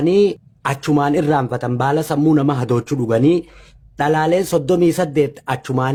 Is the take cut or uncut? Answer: uncut